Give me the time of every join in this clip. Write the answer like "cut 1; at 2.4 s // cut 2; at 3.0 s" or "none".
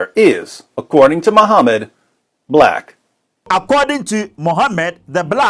cut 1; at 3.5 s